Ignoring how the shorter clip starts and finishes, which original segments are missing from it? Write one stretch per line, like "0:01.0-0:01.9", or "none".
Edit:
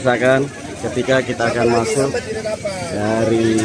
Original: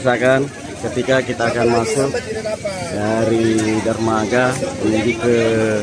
none